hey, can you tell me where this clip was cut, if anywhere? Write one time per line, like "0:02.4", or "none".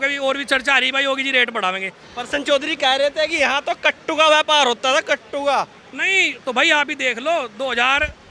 0:02.1